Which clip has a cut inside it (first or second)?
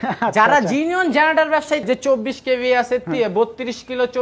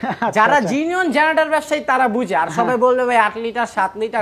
first